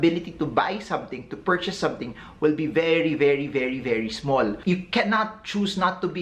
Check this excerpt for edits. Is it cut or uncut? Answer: cut